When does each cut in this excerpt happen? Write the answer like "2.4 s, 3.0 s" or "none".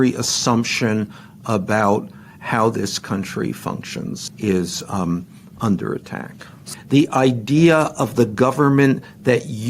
4.3 s, 6.6 s